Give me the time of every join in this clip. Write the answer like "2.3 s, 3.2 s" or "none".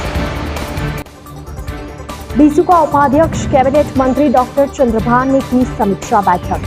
2.3 s